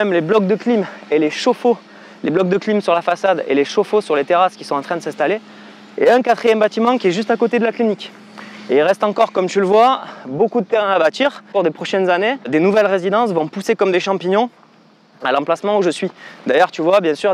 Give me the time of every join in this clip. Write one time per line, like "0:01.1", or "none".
0:11.5
0:12.5